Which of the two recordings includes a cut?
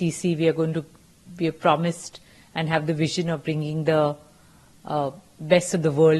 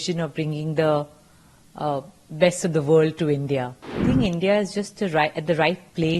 second; 1 cut; at 4.0 s

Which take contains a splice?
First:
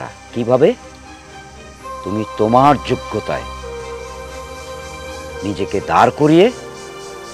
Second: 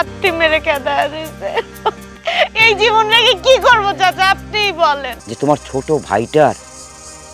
second; 2 cuts; at 2.1 s, 5.2 s

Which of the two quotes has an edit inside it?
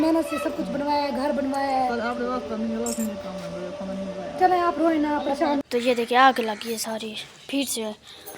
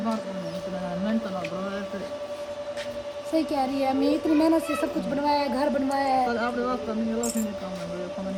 first; 1 cut; at 5.6 s

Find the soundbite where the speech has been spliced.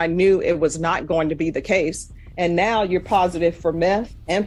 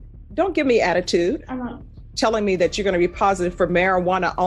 second; 1 cut; at 2.0 s

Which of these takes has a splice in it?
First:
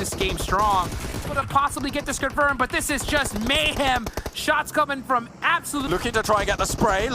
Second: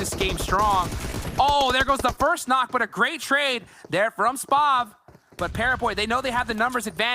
first; 2 cuts; at 1.3 s, 5.9 s

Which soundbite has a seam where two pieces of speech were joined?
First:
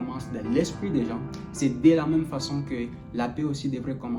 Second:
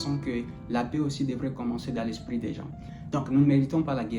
second; 1 cut; at 2.7 s

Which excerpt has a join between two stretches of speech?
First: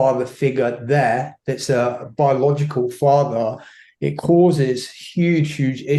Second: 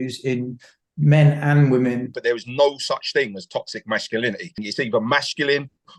second; 2 cuts; at 2.1 s, 4.7 s

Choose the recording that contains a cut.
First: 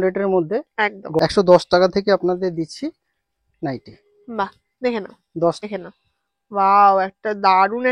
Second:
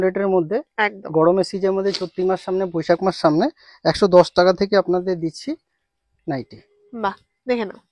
first; 2 cuts; at 1.2 s, 5.6 s

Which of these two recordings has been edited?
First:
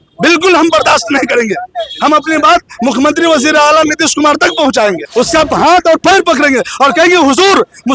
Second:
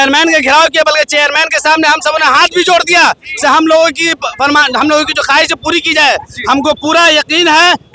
first; 1 cut; at 5.0 s

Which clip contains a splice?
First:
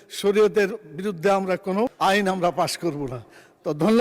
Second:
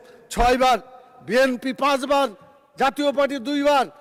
first; 1 cut; at 1.9 s

